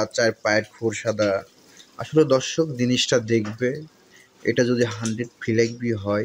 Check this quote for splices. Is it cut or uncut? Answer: uncut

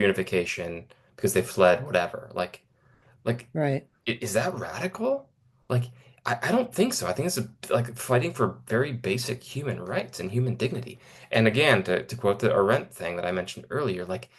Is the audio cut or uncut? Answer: uncut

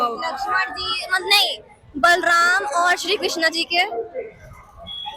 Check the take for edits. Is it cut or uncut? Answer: uncut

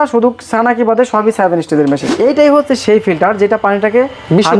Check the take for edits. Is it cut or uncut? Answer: cut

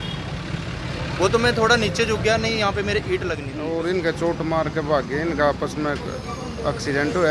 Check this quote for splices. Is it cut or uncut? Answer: cut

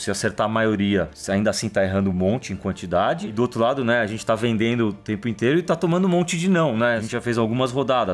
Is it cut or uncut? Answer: cut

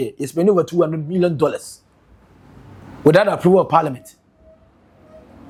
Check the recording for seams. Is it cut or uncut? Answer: uncut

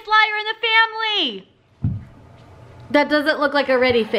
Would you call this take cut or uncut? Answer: uncut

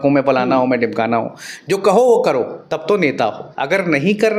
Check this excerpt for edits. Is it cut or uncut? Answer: cut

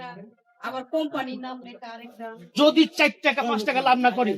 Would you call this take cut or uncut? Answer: cut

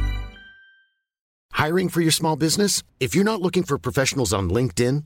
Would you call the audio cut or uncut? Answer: cut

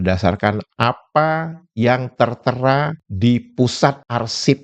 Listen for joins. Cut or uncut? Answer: uncut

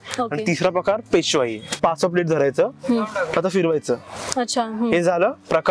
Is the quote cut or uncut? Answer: cut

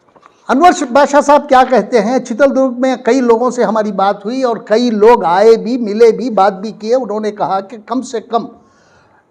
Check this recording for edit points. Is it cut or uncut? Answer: uncut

